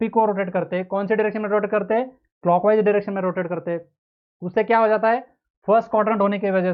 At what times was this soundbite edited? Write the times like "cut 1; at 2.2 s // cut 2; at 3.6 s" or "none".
none